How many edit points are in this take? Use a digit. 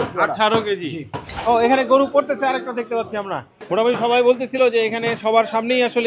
1